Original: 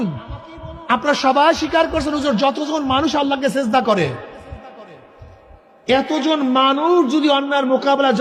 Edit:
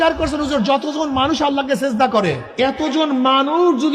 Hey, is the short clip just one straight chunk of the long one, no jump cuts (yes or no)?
no